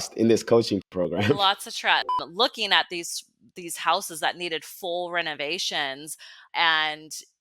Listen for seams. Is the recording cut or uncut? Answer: cut